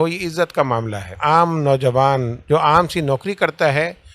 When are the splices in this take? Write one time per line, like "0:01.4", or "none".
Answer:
0:01.1
0:02.3